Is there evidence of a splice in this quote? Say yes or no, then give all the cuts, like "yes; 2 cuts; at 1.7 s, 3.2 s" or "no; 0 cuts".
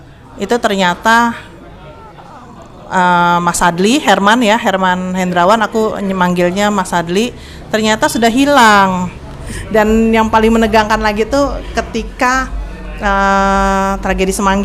yes; 1 cut; at 9.4 s